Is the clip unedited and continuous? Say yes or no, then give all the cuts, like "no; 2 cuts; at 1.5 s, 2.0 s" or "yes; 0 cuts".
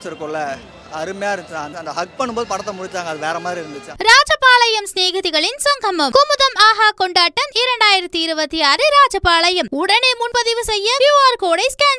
no; 2 cuts; at 1.7 s, 3.8 s